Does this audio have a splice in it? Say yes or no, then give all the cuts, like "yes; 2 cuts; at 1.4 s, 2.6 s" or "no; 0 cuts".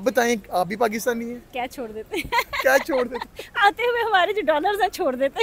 no; 0 cuts